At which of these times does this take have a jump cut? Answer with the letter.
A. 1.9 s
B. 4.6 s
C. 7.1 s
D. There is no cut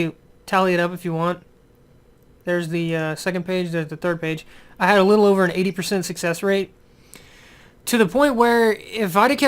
B